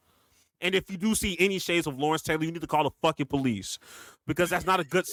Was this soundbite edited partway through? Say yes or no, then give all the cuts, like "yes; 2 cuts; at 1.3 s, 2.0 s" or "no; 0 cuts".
no; 0 cuts